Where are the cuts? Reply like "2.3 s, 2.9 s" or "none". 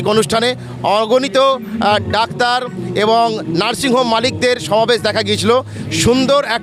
none